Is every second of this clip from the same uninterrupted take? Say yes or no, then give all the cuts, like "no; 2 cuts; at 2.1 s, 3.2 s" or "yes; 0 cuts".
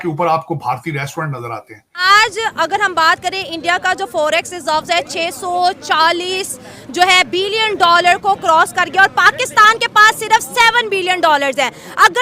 no; 1 cut; at 2.0 s